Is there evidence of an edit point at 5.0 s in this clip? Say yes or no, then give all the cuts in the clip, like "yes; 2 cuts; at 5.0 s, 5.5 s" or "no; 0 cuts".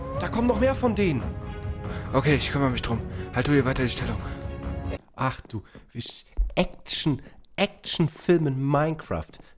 yes; 1 cut; at 5.0 s